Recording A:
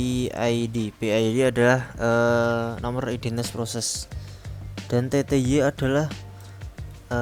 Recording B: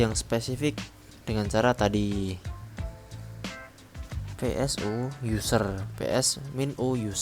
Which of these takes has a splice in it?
B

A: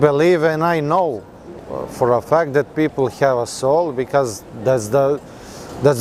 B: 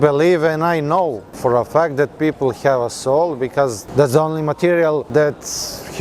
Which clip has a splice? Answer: B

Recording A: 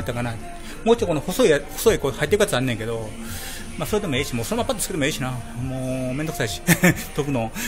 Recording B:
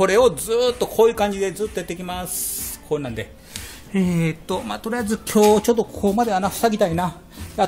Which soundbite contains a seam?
A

